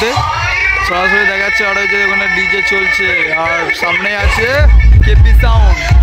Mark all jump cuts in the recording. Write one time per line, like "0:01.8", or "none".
0:05.0